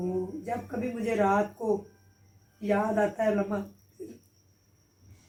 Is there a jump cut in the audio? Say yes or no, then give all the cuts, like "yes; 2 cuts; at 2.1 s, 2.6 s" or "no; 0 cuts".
no; 0 cuts